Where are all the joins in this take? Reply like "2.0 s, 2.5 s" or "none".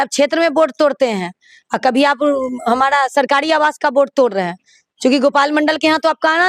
none